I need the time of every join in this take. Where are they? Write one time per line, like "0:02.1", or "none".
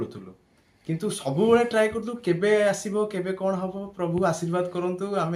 none